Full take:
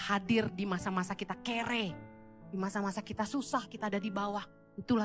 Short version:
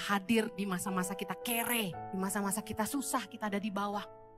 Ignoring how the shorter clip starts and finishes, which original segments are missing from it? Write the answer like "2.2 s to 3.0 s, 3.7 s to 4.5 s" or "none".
2.0 s to 2.4 s